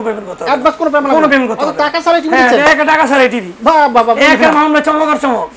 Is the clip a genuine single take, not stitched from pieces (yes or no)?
yes